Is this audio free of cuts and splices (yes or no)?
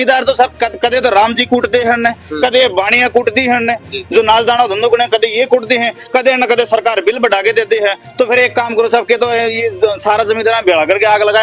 yes